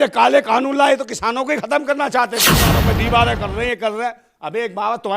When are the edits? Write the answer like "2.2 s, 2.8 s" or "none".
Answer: 2.6 s